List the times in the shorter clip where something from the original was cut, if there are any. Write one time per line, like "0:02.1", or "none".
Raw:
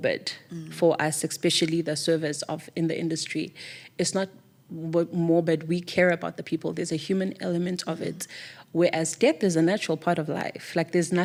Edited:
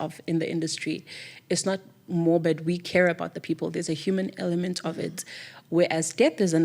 0:02.1

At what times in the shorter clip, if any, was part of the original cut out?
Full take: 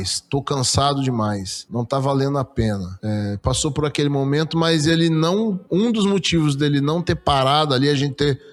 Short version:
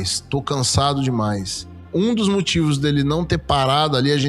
0:01.8

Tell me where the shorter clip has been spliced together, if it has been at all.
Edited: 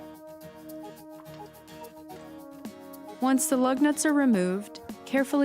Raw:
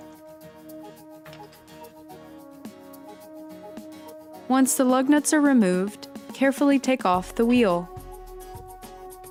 0:03.2

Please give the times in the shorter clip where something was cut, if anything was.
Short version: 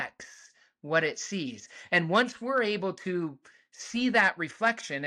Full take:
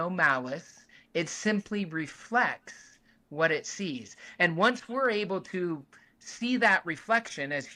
none

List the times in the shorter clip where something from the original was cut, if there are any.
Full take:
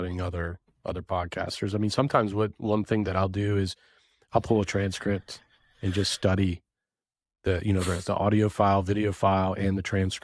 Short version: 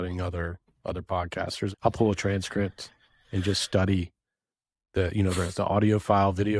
0:01.7

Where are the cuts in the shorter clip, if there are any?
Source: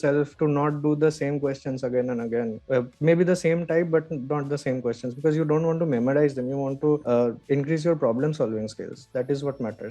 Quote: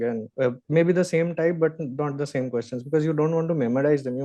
none

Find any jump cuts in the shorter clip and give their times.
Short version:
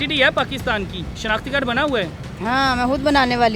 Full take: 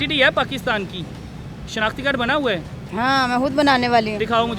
0:01.1

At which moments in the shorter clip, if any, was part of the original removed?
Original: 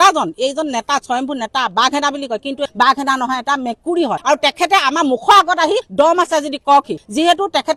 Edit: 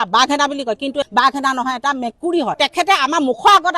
0:02.6

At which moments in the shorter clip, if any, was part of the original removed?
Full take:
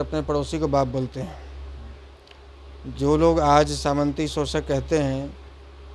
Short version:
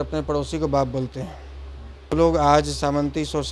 0:02.1

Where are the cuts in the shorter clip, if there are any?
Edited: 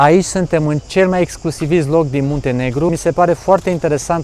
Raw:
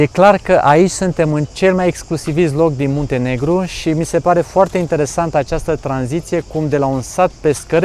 0:02.9

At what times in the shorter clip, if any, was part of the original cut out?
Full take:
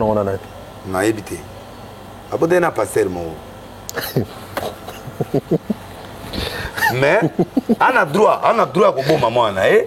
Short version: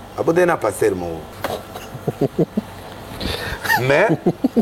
0:01.3

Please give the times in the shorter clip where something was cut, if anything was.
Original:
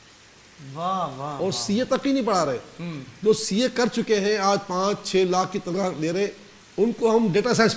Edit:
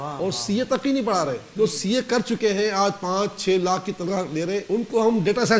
0:01.4
0:04.6

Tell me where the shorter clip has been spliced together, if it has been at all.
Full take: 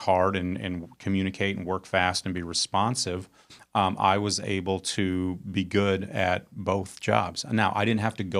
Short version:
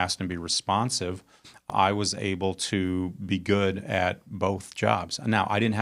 0:01.7

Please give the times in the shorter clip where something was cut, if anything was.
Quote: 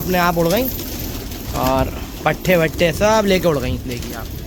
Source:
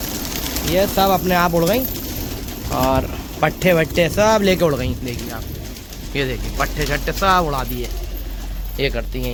none

